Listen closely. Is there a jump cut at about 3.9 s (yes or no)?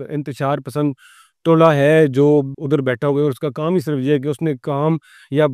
no